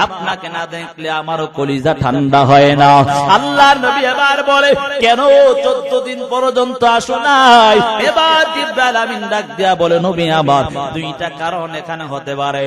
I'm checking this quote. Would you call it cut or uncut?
uncut